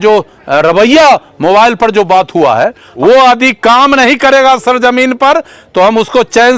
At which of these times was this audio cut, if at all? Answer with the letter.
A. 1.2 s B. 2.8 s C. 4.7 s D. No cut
B